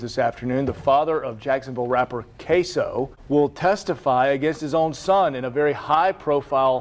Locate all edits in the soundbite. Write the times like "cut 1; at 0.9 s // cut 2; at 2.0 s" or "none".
cut 1; at 3.2 s